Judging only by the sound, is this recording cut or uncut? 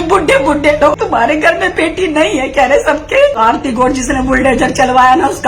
cut